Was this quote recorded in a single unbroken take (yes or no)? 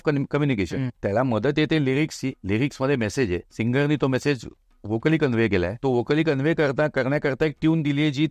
no